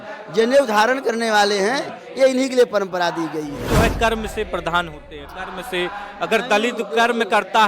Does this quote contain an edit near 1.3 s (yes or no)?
no